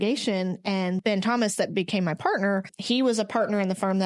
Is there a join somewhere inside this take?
yes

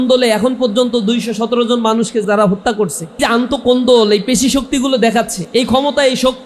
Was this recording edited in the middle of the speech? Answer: yes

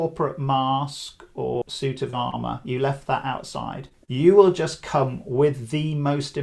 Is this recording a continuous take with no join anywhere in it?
yes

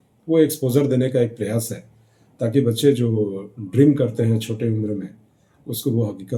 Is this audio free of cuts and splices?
yes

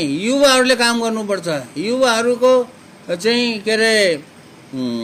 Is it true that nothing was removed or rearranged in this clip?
yes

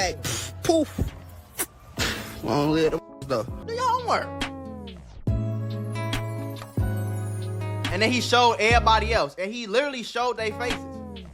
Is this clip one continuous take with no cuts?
no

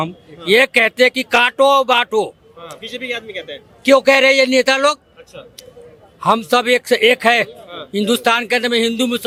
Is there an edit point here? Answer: no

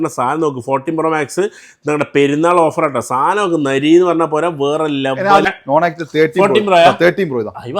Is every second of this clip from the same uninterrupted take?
no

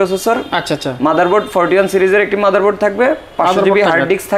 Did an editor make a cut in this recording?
no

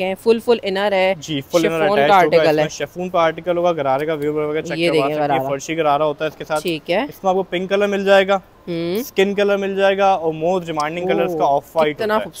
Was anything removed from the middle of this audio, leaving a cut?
no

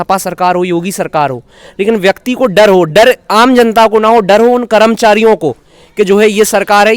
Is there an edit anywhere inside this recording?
no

